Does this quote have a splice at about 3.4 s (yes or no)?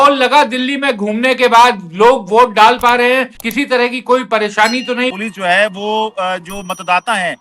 yes